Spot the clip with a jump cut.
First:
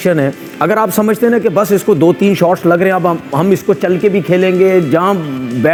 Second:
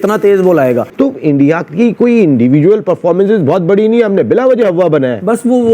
second; 1 cut; at 0.9 s

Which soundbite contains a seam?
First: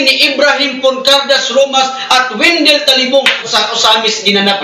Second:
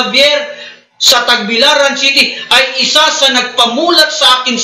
first; 1 cut; at 3.5 s

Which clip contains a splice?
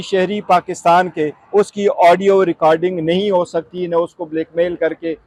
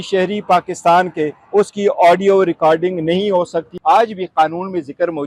second; 1 cut; at 3.7 s

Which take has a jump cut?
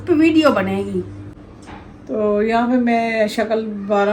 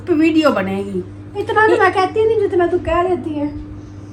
first; 1 cut; at 1.2 s

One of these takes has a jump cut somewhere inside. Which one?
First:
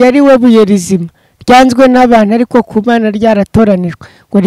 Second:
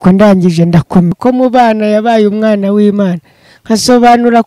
second; 1 cut; at 1.2 s

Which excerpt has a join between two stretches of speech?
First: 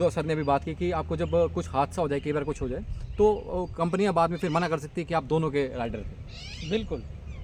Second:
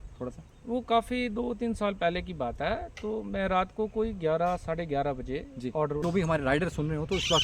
second; 1 cut; at 6.0 s

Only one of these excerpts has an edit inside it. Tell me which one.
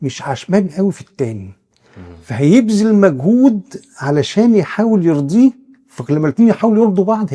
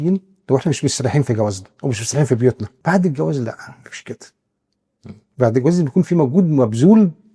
second; 1 cut; at 2.7 s

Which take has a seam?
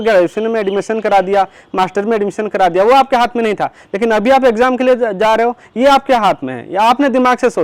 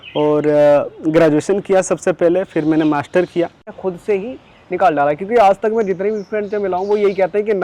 second; 1 cut; at 3.7 s

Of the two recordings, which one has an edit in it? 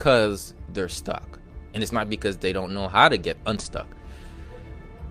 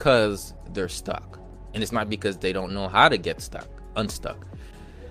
first; 1 cut; at 3.4 s

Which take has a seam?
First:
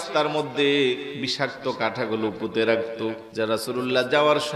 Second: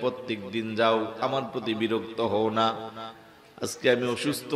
first; 2 cuts; at 1.2 s, 3.2 s

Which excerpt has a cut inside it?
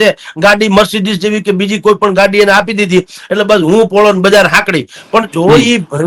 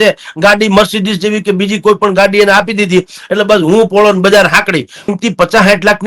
second; 1 cut; at 5.1 s

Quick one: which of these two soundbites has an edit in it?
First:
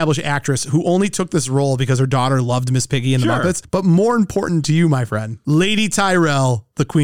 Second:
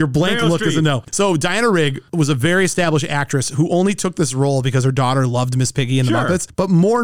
second; 1 cut; at 1.1 s

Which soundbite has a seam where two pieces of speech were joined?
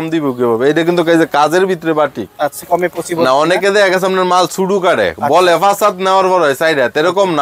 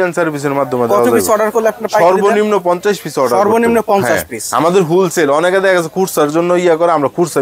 first; 1 cut; at 2.6 s

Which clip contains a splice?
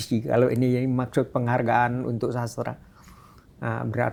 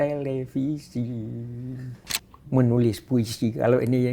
second; 1 cut; at 2.1 s

